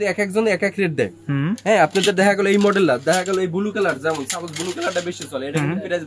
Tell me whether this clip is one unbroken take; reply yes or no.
yes